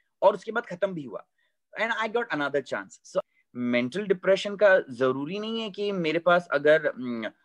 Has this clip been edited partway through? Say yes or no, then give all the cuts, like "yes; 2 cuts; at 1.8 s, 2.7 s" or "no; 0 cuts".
yes; 1 cut; at 3.3 s